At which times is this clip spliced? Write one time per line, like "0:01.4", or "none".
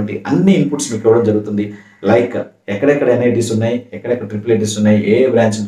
none